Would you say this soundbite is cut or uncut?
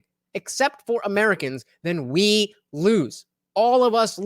uncut